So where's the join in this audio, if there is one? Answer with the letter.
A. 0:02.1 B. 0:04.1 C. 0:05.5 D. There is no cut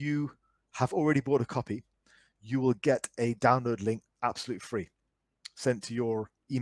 D